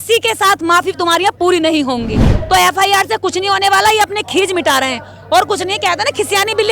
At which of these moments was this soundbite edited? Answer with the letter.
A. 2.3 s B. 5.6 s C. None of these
A